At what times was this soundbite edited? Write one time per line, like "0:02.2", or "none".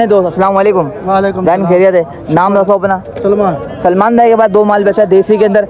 none